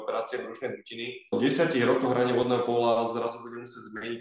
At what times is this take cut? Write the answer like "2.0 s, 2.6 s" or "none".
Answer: 1.3 s